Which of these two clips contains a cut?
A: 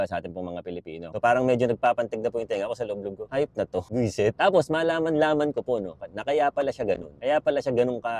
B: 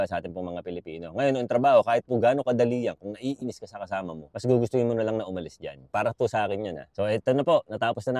A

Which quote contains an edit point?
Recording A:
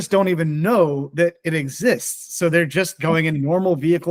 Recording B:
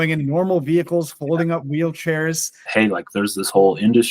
B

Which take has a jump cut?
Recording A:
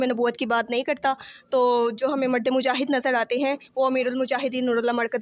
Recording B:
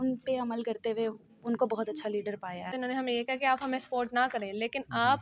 B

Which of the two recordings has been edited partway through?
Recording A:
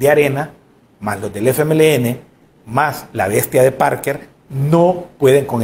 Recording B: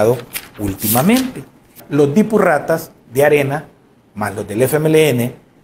B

